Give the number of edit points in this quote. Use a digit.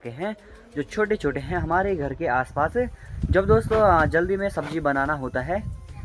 0